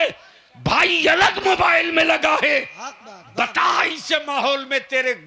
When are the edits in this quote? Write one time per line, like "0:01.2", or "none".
none